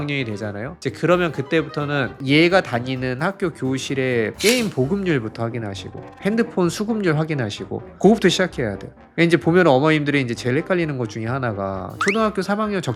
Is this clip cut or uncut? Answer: uncut